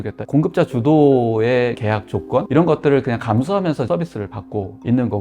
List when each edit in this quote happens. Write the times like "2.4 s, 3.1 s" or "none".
1.8 s, 3.9 s